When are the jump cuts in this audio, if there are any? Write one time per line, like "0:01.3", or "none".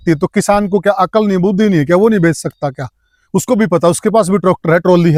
none